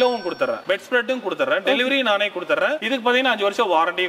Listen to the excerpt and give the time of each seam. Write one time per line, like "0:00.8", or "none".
none